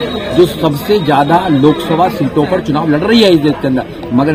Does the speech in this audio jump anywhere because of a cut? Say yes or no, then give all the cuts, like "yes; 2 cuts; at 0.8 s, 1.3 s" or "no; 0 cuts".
no; 0 cuts